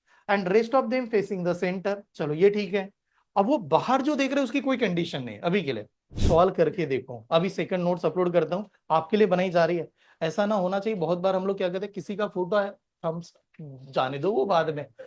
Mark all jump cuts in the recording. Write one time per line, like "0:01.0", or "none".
0:06.1